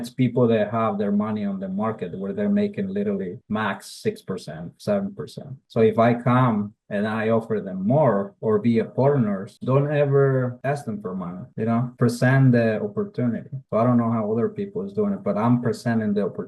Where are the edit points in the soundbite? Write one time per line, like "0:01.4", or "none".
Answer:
0:09.5